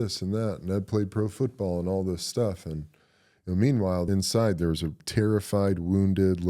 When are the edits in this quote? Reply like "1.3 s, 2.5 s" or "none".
4.0 s, 5.0 s